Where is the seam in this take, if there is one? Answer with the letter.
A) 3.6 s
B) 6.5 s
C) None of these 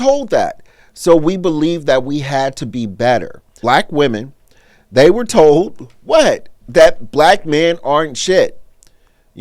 A